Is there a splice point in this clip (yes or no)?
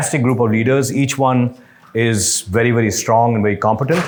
no